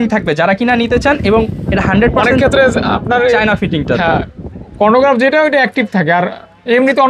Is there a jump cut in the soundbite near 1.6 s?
no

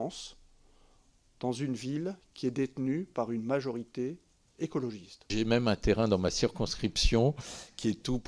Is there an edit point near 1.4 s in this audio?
no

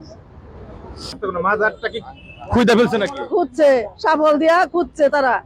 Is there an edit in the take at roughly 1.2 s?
yes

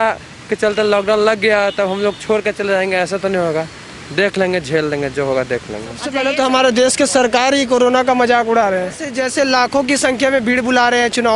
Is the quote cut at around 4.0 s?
no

